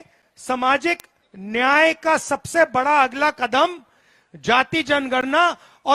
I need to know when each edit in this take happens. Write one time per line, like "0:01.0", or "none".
none